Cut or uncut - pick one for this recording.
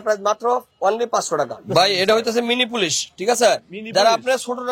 cut